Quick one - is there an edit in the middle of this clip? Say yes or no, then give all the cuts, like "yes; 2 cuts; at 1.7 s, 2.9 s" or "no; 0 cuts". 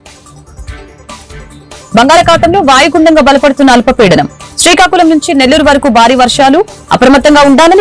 no; 0 cuts